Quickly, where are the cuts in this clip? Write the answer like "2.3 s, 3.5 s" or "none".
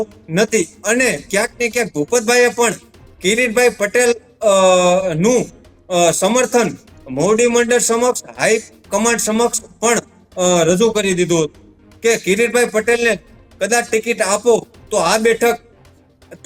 none